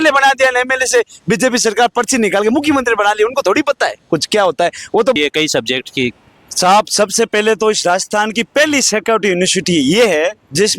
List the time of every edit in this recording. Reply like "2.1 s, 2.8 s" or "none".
5.2 s